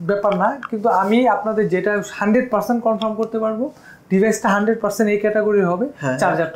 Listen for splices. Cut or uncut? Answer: uncut